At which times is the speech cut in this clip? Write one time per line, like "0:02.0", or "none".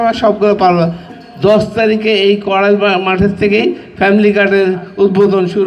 0:01.1

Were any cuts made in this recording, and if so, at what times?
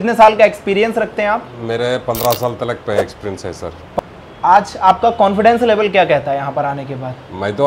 0:04.0

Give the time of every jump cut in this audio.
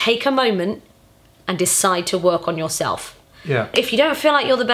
none

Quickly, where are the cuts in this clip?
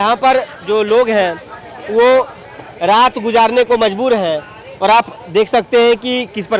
none

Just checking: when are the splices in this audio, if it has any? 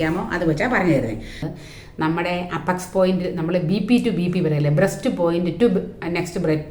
0:01.4

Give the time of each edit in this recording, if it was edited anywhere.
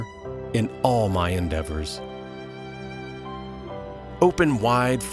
0:02.5
0:04.2

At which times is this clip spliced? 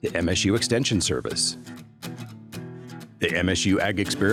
none

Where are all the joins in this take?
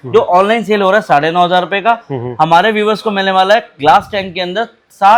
none

